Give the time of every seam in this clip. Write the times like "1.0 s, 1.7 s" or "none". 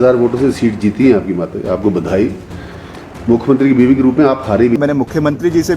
4.8 s